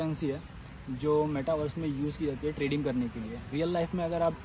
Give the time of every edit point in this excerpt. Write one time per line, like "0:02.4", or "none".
none